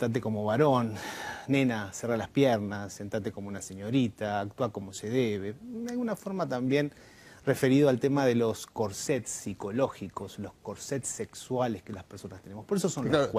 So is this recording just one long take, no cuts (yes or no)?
no